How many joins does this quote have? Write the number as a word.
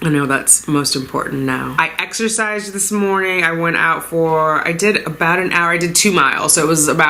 one